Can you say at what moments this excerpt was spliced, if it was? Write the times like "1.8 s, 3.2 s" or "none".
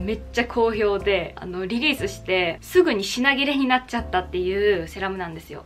none